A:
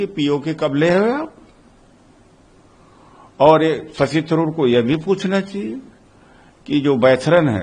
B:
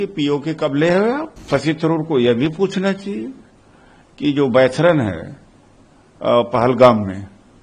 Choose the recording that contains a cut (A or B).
B